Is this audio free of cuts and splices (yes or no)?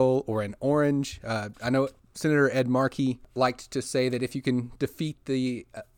no